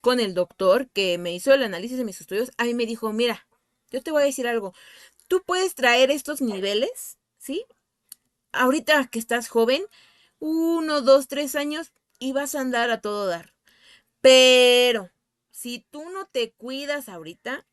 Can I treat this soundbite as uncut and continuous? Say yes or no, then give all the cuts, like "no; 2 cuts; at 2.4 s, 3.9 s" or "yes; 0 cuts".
yes; 0 cuts